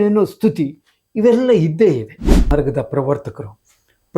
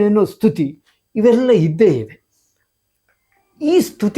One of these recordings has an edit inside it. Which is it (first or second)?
first